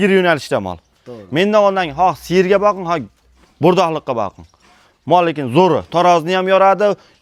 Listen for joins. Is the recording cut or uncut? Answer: uncut